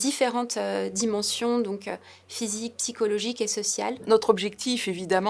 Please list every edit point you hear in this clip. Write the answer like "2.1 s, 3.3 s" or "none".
4.0 s